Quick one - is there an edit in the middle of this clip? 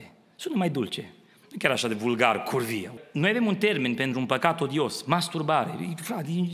yes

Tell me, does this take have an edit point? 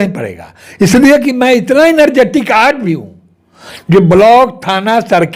no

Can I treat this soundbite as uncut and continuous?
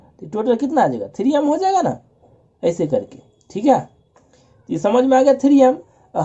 yes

